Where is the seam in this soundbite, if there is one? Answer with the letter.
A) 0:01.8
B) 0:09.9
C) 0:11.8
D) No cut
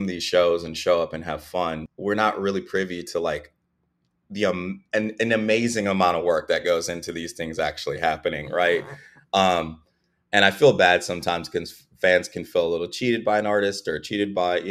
A